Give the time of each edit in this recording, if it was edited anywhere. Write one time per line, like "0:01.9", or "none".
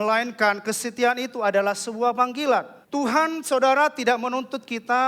0:02.8